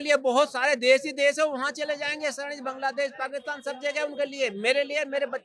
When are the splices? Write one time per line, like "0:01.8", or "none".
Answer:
none